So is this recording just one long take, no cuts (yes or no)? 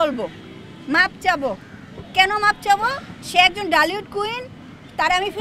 yes